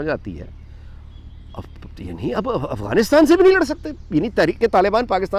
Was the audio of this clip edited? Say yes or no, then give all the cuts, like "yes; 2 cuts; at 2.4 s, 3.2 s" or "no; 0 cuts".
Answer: no; 0 cuts